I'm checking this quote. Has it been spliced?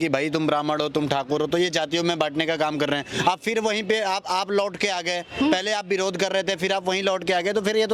no; 0 cuts

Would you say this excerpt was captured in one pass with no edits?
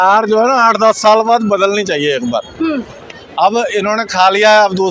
yes; 0 cuts

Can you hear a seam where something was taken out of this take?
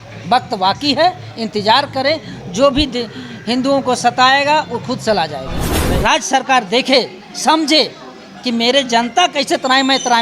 yes; 1 cut; at 5.8 s

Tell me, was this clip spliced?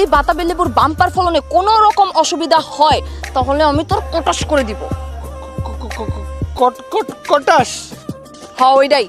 no; 0 cuts

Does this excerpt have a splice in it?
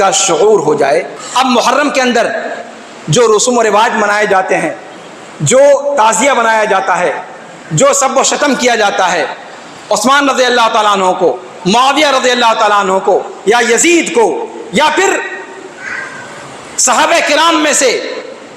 yes; 1 cut; at 1.2 s

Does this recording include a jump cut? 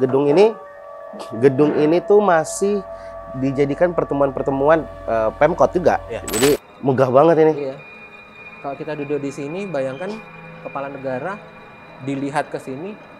yes; 1 cut; at 6.7 s

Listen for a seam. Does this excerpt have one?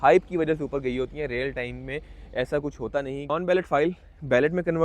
yes; 1 cut; at 3.3 s

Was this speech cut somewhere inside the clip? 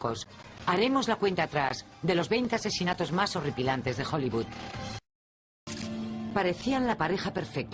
yes; 1 cut; at 3.8 s

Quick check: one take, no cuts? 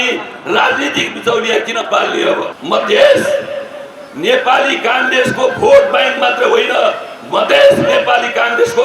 no; 1 cut; at 2.5 s

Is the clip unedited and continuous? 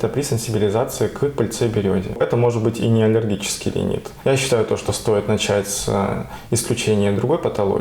no; 2 cuts; at 2.2 s, 4.1 s

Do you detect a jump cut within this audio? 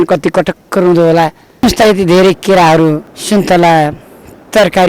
no; 0 cuts

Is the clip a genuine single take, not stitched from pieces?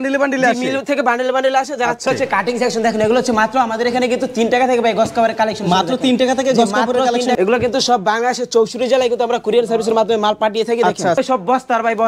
no; 3 cuts; at 2.0 s, 7.3 s, 11.2 s

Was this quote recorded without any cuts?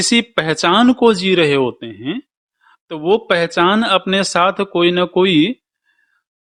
yes; 0 cuts

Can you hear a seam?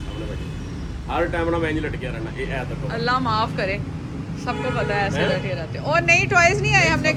no; 0 cuts

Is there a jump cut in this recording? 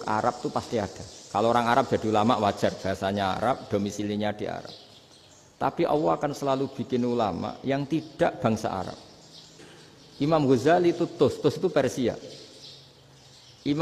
no; 0 cuts

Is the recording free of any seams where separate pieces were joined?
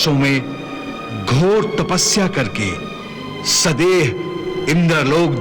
yes; 0 cuts

